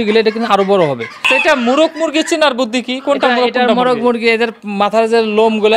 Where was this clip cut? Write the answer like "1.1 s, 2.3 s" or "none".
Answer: 1.2 s

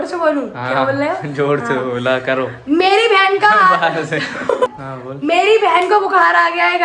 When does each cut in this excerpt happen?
4.7 s

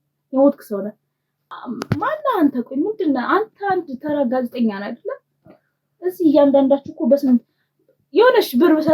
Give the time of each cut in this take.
1.5 s

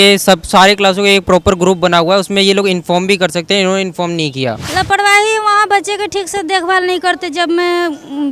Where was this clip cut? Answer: 4.6 s

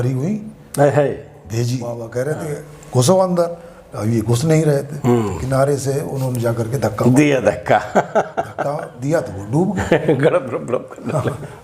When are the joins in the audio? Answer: 1.9 s

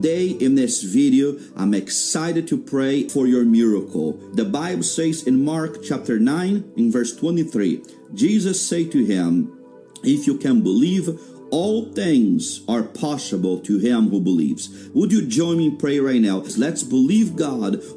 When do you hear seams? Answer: 3.1 s

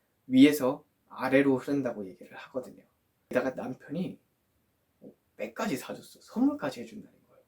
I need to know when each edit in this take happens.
3.3 s

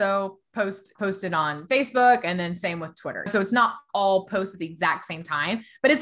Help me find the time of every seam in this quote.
0.9 s, 3.3 s

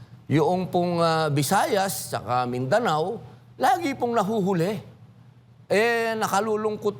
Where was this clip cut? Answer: none

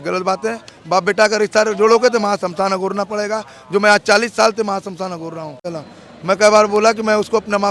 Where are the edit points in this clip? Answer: 5.7 s

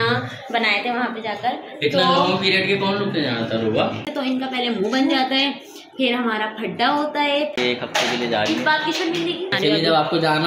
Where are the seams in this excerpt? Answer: 4.0 s, 7.5 s, 9.6 s

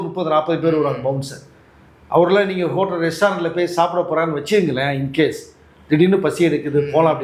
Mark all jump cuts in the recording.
none

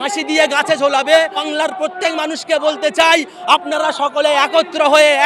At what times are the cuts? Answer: 1.5 s

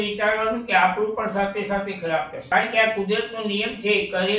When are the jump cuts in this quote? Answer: 2.4 s

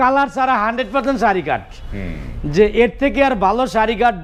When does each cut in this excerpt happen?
none

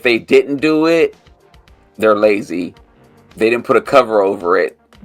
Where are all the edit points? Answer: none

